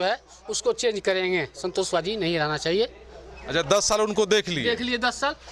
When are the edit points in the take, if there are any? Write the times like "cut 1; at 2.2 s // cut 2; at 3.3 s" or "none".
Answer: none